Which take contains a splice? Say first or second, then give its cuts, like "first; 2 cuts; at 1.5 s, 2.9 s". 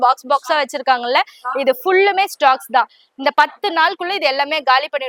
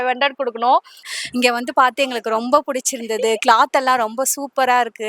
second; 1 cut; at 1.1 s